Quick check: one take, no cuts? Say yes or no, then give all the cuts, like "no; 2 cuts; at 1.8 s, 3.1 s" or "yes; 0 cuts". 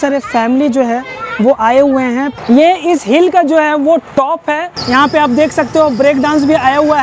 no; 2 cuts; at 2.3 s, 4.7 s